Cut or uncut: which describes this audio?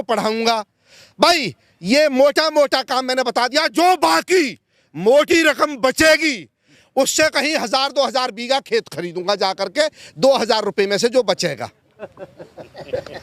uncut